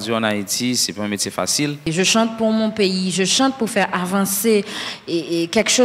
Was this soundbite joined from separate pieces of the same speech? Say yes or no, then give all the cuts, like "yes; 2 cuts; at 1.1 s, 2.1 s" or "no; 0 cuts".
no; 0 cuts